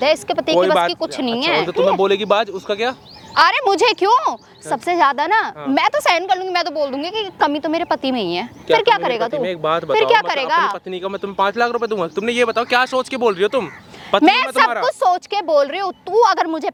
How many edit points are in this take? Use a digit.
0